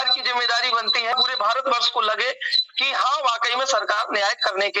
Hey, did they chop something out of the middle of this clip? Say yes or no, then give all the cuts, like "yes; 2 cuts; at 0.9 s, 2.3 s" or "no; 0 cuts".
yes; 1 cut; at 1.1 s